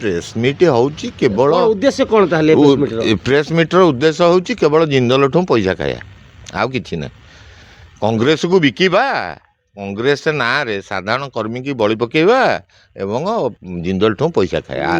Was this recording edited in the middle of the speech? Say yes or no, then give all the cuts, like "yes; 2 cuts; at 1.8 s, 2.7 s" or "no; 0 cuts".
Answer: no; 0 cuts